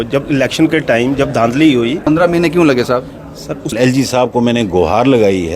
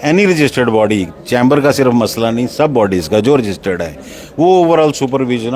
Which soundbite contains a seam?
first; 2 cuts; at 2.0 s, 3.7 s

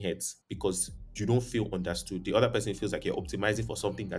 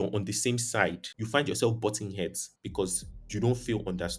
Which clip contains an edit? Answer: second; 1 cut; at 1.1 s

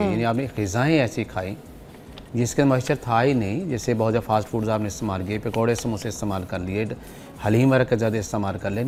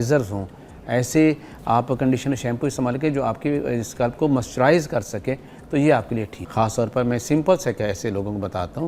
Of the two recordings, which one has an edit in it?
second; 1 cut; at 6.4 s

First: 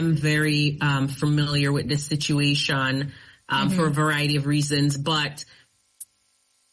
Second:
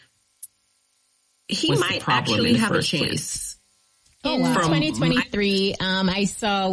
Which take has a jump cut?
second; 1 cut; at 5.1 s

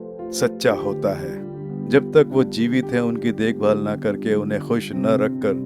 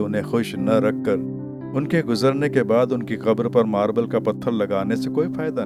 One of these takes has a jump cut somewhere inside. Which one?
first; 1 cut; at 1.8 s

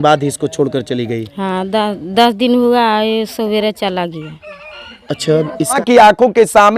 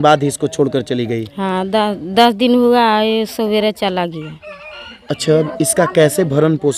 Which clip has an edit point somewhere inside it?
first; 1 cut; at 5.8 s

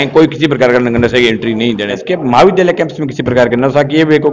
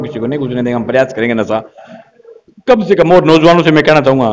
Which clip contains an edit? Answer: first; 1 cut; at 2.0 s

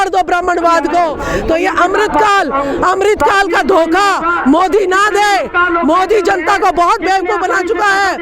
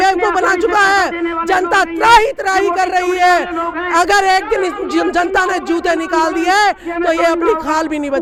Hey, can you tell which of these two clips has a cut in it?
first; 1 cut; at 1.3 s

